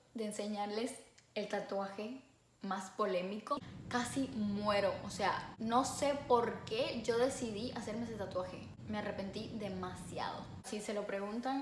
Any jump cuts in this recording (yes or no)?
yes